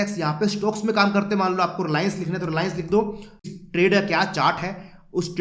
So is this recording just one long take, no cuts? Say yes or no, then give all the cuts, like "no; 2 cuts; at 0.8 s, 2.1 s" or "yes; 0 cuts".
no; 1 cut; at 3.4 s